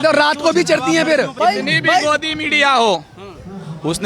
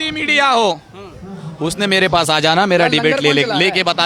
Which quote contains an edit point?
first; 1 cut; at 1.3 s

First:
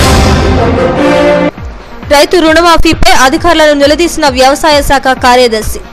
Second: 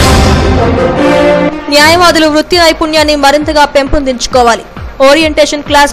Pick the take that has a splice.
second; 1 cut; at 1.5 s

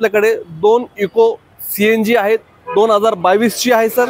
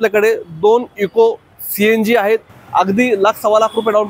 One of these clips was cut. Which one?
second; 1 cut; at 2.6 s

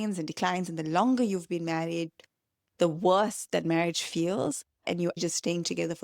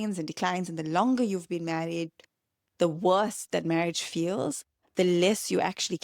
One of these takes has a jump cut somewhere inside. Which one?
first; 1 cut; at 4.9 s

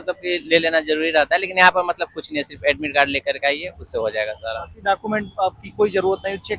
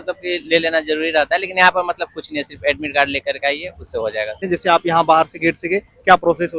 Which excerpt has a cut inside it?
second; 1 cut; at 4.4 s

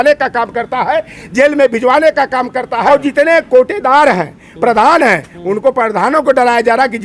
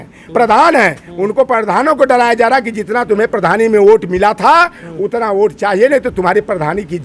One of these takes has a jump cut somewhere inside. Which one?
first; 1 cut; at 2.9 s

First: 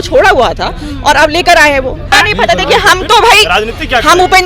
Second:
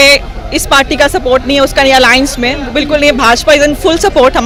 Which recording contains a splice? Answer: first; 1 cut; at 2.1 s

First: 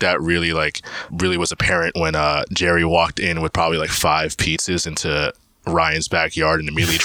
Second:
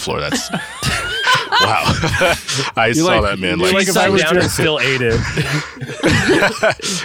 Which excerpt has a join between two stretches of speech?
first; 1 cut; at 1.1 s

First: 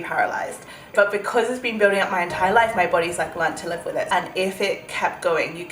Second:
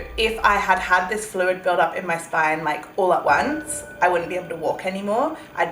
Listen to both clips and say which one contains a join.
first; 2 cuts; at 0.9 s, 4.1 s

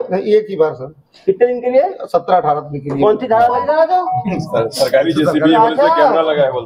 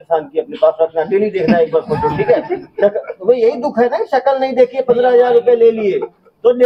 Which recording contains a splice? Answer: first; 1 cut; at 3.6 s

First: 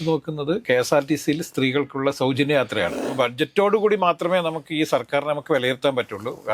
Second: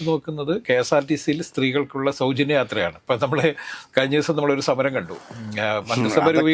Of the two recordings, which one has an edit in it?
first; 1 cut; at 3.0 s

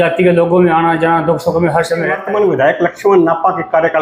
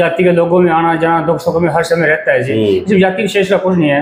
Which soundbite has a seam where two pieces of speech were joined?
first; 1 cut; at 2.2 s

